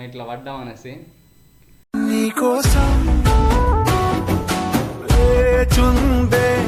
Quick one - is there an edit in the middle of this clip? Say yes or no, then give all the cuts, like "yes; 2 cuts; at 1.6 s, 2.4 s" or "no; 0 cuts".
no; 0 cuts